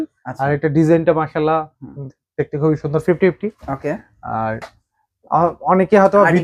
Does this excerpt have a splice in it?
no; 0 cuts

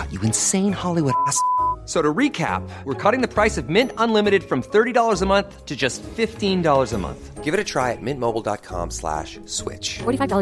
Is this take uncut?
yes; 0 cuts

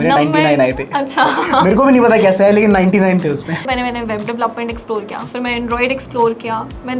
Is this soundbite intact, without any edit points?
no; 1 cut; at 3.6 s

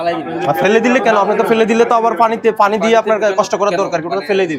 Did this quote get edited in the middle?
no; 0 cuts

